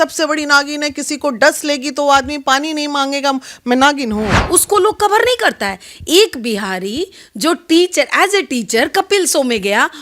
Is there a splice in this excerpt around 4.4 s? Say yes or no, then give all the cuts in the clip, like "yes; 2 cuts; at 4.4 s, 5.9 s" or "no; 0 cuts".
yes; 1 cut; at 4.4 s